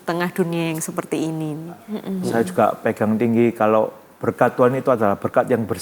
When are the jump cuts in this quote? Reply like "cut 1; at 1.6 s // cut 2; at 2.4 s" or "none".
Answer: cut 1; at 2.0 s